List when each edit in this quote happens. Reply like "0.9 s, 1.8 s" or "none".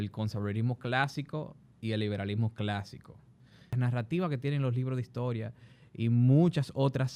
3.7 s

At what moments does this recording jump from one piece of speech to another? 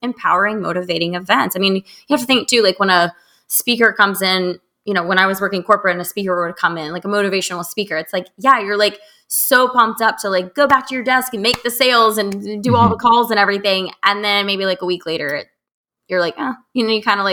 none

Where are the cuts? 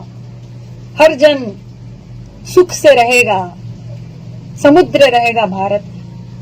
none

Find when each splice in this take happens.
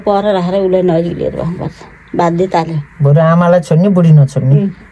none

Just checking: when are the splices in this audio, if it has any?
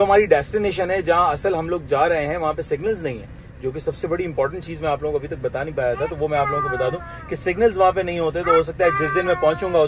none

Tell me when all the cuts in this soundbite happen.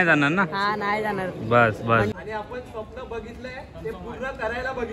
2.1 s

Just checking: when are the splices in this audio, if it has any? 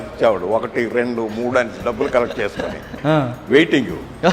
none

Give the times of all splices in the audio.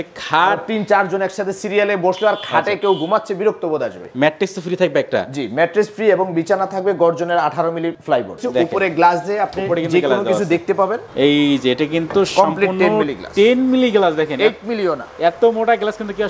4.0 s, 8.2 s, 11.1 s

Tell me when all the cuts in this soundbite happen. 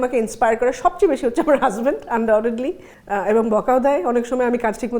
none

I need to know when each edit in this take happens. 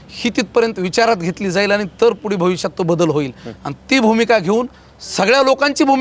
none

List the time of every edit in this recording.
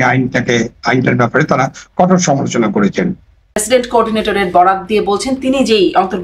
3.6 s

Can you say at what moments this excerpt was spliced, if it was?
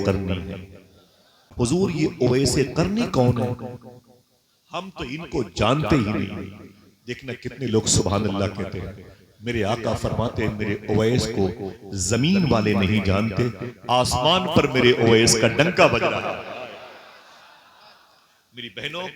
1.4 s

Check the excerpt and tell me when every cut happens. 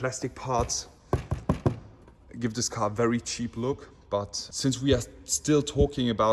none

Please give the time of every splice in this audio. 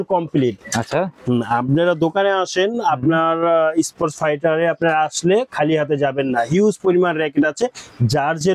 none

